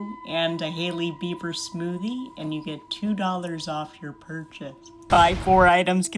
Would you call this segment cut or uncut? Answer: cut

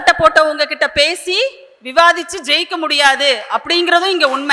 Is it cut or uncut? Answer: uncut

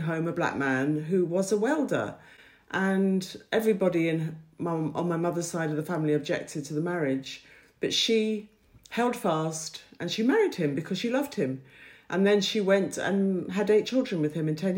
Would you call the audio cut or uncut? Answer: uncut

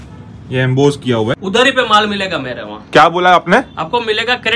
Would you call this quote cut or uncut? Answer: cut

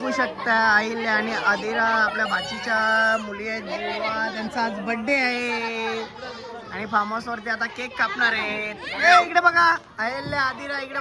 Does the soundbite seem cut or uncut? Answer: uncut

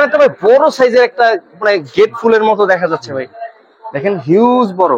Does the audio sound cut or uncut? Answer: uncut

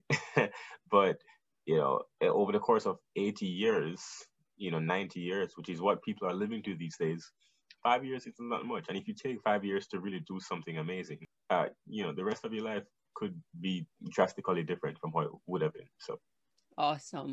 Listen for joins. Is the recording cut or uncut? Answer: cut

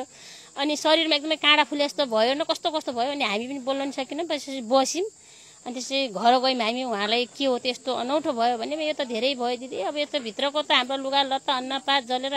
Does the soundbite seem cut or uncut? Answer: uncut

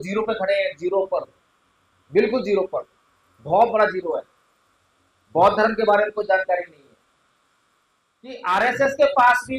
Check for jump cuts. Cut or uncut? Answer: cut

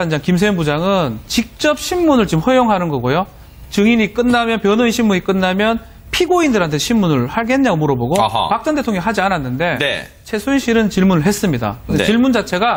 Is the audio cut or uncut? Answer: uncut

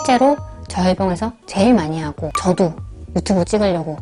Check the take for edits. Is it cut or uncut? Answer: uncut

